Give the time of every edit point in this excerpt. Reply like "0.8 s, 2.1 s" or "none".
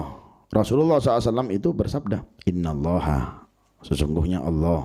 2.3 s